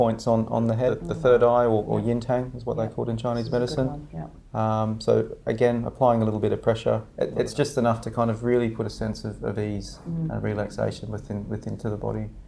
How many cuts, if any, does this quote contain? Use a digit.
2